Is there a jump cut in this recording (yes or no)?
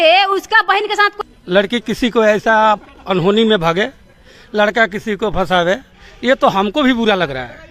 yes